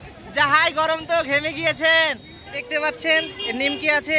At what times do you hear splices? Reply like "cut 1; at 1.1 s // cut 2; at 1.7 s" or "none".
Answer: cut 1; at 2.6 s